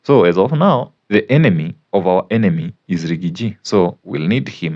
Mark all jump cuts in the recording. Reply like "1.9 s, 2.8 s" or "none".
1.0 s, 1.8 s